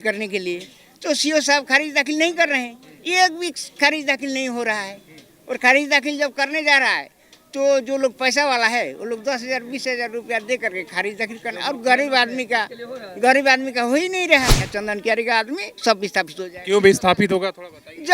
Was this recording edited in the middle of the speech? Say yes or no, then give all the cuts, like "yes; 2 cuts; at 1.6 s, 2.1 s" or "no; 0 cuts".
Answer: yes; 1 cut; at 14.7 s